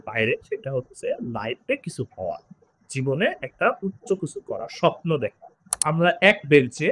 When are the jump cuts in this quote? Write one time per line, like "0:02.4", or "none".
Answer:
0:05.8